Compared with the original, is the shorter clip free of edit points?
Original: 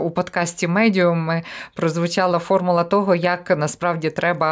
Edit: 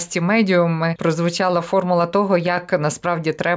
no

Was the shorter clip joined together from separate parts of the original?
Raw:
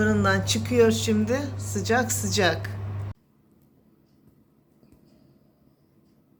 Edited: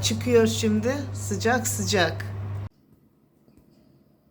yes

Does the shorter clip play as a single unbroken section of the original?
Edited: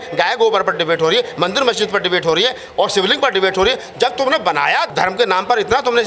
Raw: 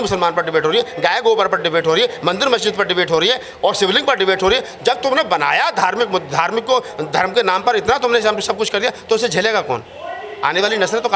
no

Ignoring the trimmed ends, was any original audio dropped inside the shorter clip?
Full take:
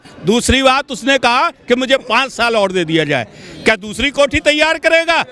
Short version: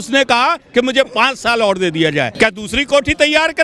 yes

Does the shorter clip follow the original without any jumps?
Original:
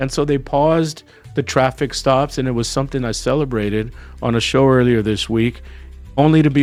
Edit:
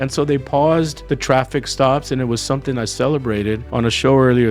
no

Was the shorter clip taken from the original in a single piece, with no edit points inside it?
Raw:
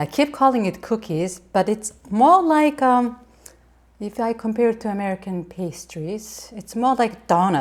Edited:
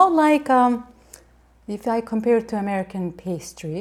yes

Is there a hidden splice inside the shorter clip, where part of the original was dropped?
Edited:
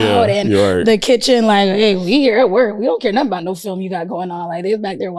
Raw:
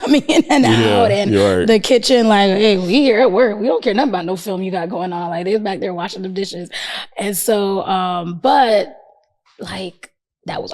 no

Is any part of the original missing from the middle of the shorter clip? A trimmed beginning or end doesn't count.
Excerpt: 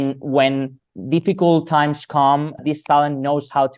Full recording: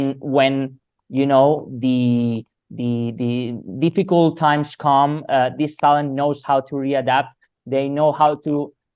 yes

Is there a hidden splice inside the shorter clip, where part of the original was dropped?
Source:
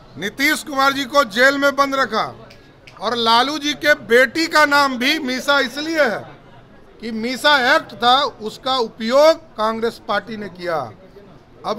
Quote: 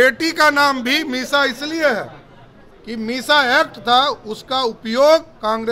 no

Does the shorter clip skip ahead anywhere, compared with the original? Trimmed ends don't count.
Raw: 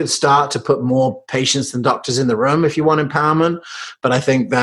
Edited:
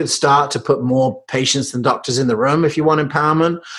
no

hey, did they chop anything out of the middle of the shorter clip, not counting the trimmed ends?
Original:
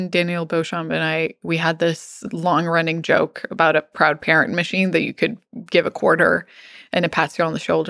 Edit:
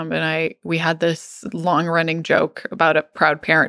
no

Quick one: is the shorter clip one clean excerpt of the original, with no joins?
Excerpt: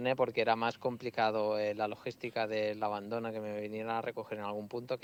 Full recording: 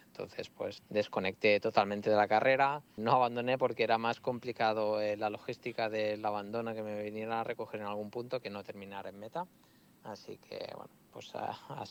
yes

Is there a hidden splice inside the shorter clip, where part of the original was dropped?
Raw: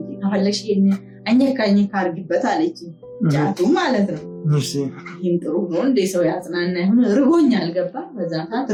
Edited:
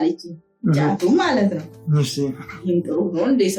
no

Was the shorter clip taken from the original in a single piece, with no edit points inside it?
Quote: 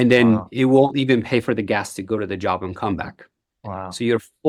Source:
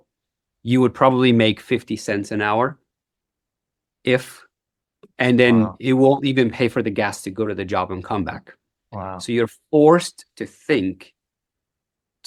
yes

